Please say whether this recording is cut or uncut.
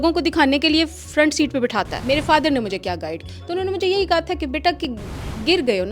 cut